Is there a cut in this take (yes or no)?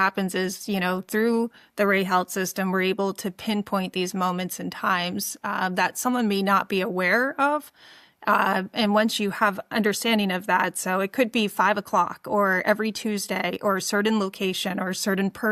no